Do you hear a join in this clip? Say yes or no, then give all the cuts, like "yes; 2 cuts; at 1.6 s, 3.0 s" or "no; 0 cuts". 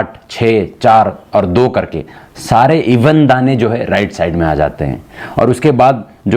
no; 0 cuts